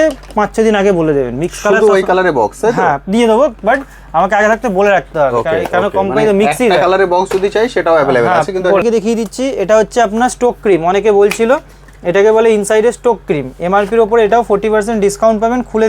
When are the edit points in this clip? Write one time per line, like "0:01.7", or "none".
0:08.8